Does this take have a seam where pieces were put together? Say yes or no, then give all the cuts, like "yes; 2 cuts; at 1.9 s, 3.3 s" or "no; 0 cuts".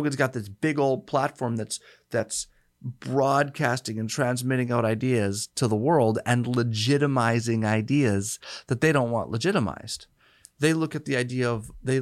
no; 0 cuts